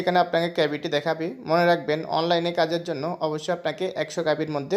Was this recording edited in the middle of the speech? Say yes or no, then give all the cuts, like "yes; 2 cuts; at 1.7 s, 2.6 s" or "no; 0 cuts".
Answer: no; 0 cuts